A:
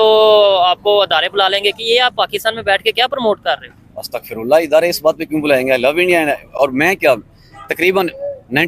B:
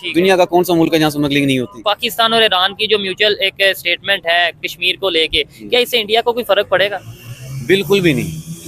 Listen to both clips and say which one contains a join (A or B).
B